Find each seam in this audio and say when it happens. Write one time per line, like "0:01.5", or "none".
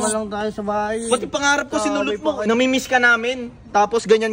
0:02.4